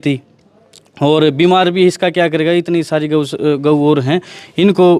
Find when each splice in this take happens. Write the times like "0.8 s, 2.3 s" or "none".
none

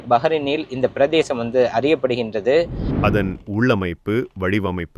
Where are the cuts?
2.8 s

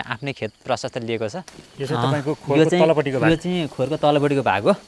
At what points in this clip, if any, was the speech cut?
1.4 s

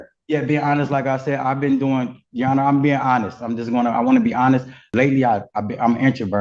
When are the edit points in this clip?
4.8 s

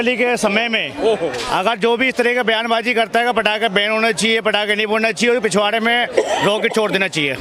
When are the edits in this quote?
none

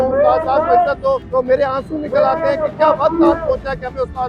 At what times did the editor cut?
1.2 s

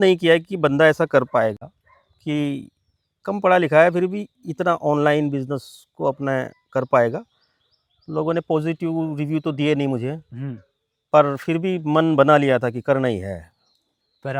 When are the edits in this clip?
none

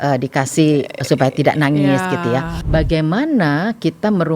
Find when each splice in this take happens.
2.6 s

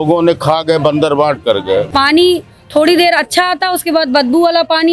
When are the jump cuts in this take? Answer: 1.9 s

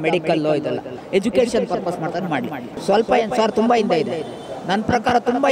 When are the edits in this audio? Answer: 2.7 s

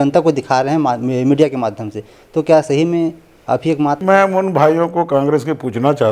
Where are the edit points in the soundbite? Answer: none

